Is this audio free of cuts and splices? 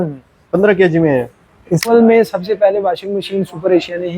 no; 1 cut; at 1.9 s

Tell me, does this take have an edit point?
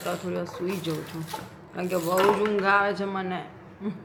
no; 0 cuts

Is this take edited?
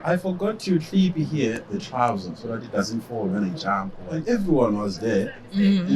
yes; 1 cut; at 4.1 s

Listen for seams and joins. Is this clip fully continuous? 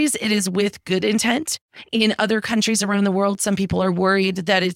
yes; 0 cuts

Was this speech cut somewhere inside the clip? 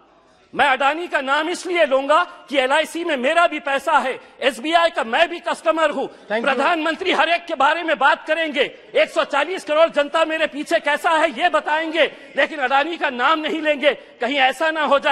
no; 0 cuts

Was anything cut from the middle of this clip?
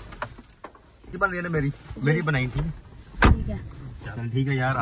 yes; 1 cut; at 1.2 s

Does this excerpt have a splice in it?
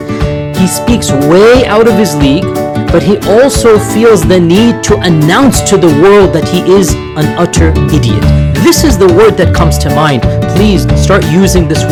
no; 0 cuts

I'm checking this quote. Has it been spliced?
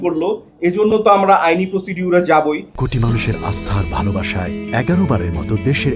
yes; 1 cut; at 2.7 s

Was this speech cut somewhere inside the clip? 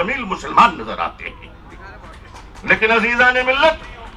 no; 0 cuts

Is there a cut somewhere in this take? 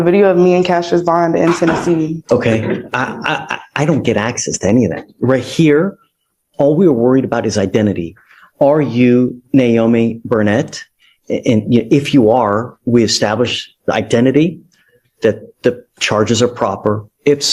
yes; 1 cut; at 2.2 s

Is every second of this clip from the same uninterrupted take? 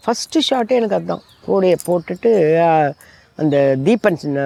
yes; 0 cuts

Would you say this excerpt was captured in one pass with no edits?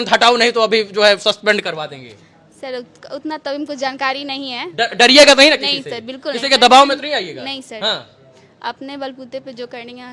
yes; 0 cuts

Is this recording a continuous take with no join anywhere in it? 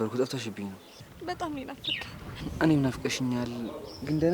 yes; 0 cuts

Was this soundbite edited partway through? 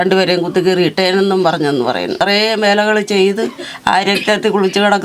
yes; 1 cut; at 2.2 s

